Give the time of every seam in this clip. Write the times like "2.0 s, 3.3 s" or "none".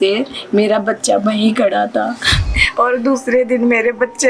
2.5 s

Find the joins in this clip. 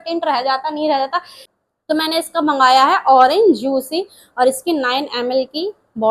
1.4 s

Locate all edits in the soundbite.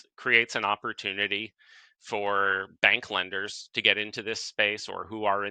none

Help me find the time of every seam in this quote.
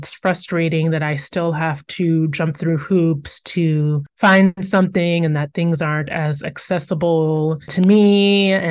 none

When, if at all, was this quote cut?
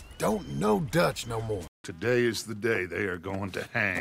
1.7 s

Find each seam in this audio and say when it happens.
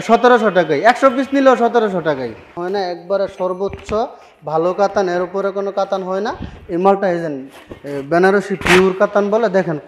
2.6 s

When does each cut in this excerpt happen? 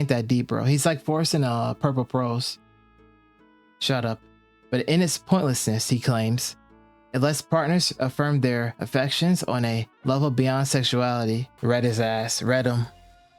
11.5 s

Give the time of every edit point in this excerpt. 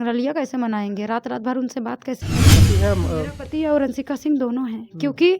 2.7 s

